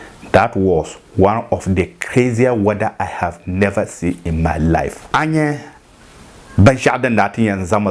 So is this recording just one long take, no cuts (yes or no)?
no